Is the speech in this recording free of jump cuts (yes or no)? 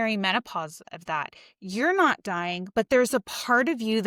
yes